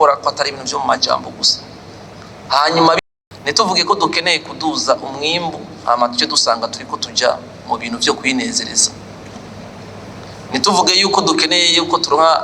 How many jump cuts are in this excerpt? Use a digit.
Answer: 1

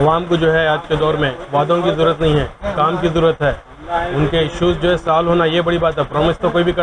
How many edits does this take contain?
0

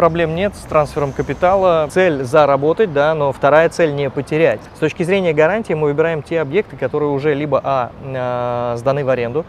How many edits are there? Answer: 2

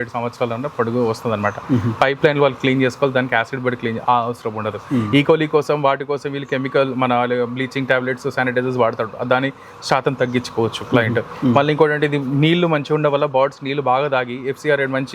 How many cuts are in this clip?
0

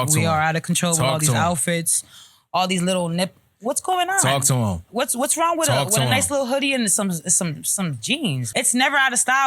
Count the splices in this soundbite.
1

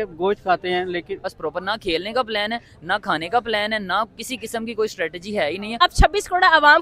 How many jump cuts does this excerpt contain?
2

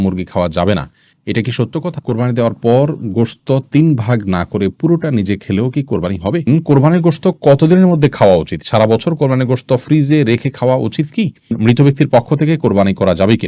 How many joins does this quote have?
3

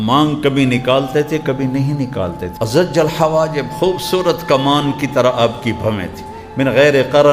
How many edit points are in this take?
1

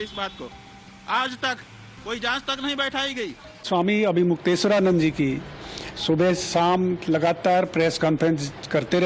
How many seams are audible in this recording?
1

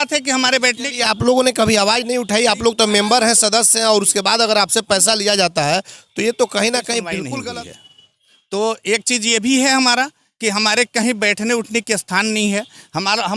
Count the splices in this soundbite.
1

